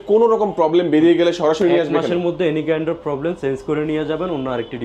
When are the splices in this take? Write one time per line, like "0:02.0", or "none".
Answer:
none